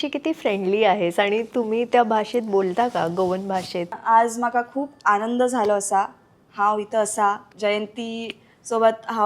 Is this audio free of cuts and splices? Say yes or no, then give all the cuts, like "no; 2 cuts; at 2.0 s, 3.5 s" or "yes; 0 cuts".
no; 2 cuts; at 4.0 s, 7.5 s